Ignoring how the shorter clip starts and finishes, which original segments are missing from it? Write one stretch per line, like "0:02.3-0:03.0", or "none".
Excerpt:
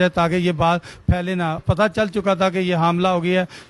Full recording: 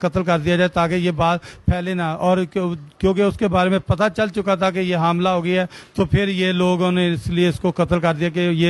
0:02.2-0:03.8

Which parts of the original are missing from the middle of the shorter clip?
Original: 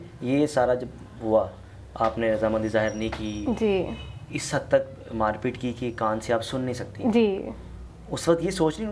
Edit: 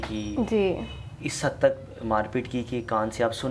none

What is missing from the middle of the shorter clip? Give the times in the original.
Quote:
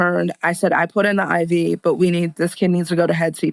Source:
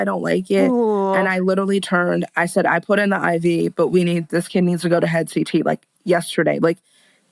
none

